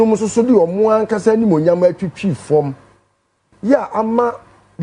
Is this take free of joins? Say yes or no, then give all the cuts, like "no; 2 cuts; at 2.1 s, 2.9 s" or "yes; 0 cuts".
yes; 0 cuts